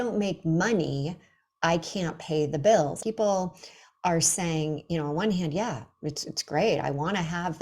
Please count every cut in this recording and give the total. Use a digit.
1